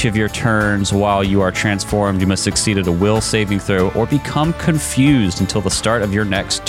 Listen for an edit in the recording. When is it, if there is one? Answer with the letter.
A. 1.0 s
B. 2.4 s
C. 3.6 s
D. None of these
D